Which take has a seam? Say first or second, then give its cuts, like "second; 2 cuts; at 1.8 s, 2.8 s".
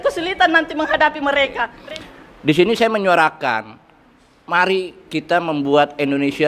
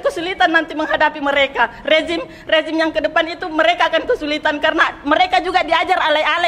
first; 1 cut; at 1.7 s